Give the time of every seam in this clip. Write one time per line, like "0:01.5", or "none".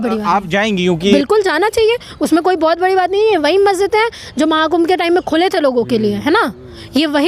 0:01.1